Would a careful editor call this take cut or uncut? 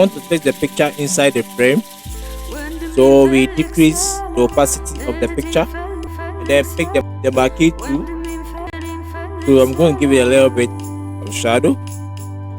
cut